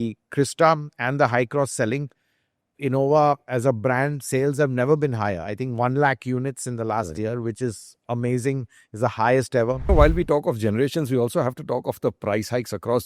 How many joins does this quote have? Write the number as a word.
one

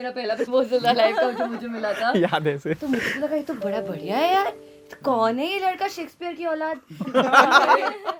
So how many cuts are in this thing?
zero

